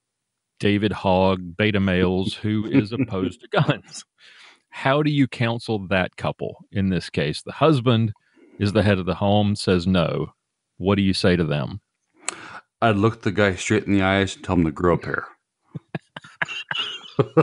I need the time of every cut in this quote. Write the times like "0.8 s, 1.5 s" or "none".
none